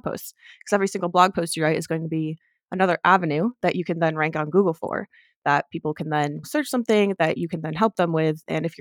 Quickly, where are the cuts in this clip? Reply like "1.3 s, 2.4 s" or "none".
none